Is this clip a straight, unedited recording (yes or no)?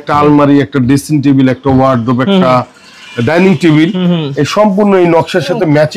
yes